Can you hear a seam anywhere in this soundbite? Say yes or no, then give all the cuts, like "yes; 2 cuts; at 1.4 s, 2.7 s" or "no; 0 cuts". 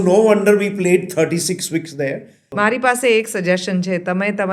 yes; 1 cut; at 2.4 s